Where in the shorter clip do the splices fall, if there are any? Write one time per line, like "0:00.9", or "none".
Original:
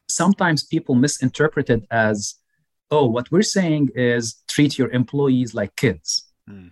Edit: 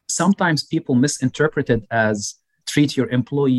0:02.5